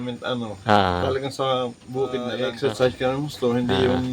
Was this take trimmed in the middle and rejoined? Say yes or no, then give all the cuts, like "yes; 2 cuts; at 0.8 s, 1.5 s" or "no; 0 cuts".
yes; 1 cut; at 2.3 s